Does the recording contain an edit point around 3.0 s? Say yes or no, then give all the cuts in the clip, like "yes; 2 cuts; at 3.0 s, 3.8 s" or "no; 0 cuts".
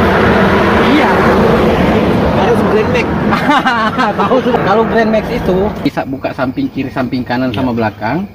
no; 2 cuts; at 4.6 s, 5.9 s